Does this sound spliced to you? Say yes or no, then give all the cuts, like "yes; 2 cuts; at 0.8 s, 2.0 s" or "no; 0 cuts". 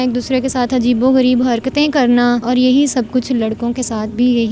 yes; 1 cut; at 2.5 s